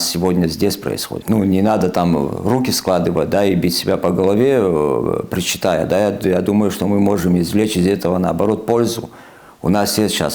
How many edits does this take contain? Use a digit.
1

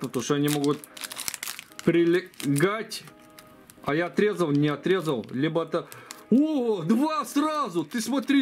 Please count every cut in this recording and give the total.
0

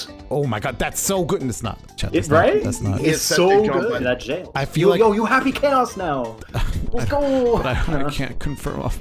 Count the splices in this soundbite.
1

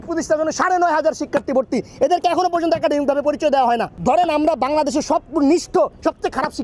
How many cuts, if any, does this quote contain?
1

